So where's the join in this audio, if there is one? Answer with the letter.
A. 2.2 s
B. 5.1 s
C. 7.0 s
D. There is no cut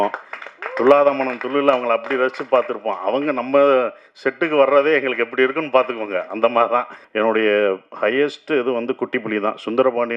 C